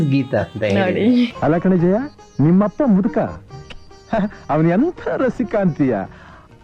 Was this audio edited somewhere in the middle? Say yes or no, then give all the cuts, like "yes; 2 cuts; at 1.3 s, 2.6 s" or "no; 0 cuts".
yes; 1 cut; at 1.3 s